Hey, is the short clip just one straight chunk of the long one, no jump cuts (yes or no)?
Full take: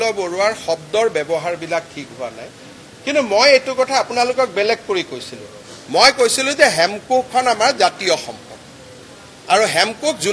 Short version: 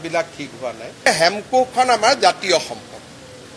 no